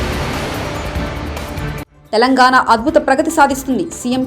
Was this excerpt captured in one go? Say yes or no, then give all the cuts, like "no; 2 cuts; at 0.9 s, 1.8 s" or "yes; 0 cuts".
no; 1 cut; at 1.8 s